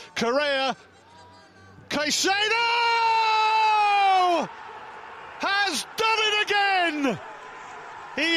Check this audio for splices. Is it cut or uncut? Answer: uncut